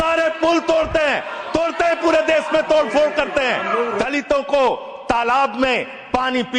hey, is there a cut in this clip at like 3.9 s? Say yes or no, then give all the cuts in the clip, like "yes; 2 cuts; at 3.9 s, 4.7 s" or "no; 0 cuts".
yes; 1 cut; at 3.9 s